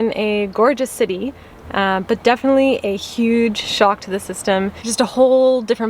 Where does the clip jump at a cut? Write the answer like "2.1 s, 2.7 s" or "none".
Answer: 4.8 s